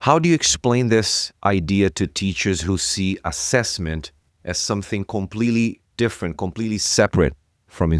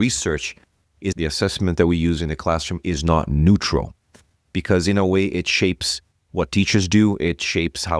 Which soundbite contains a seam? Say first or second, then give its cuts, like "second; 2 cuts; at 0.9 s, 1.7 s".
second; 1 cut; at 1.1 s